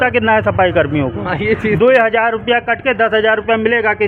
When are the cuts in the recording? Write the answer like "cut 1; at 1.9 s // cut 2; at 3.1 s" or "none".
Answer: none